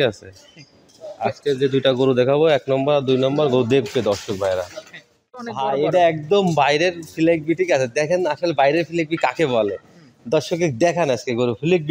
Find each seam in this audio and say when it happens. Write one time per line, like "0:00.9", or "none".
0:05.3